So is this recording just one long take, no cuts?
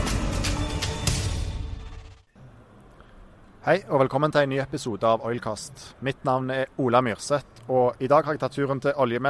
no; 1 cut; at 2.3 s

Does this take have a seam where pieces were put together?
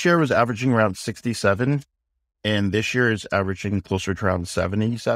no; 0 cuts

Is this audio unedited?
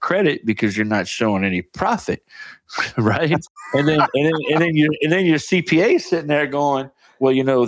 no; 1 cut; at 3.5 s

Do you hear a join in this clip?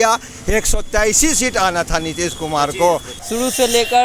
yes; 1 cut; at 3.1 s

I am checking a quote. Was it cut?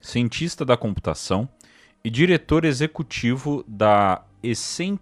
no; 0 cuts

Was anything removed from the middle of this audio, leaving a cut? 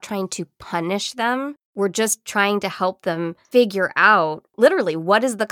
yes; 3 cuts; at 1.6 s, 3.4 s, 4.4 s

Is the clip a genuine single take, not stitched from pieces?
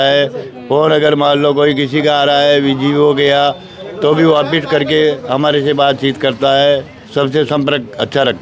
yes; 0 cuts

